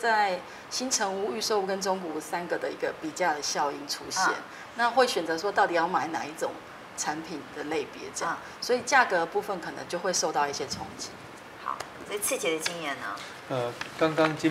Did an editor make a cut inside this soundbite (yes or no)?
no